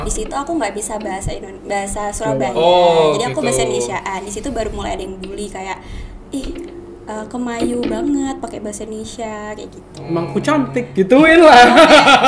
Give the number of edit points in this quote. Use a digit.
0